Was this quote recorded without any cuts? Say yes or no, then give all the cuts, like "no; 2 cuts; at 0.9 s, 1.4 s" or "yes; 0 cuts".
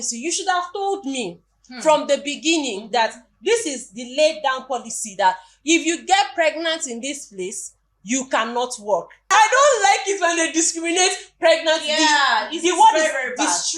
no; 1 cut; at 9.3 s